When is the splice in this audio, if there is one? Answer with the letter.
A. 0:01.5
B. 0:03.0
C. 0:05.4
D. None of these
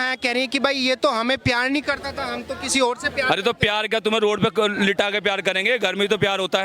D